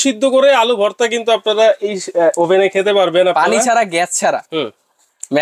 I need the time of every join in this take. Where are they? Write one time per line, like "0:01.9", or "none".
none